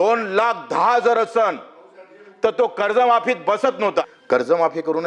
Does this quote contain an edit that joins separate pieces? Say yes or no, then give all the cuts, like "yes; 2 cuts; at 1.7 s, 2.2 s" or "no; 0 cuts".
yes; 1 cut; at 4.2 s